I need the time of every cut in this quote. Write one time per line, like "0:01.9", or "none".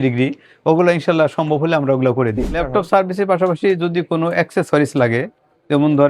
0:02.6

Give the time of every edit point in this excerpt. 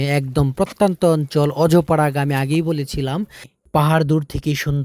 0:03.5

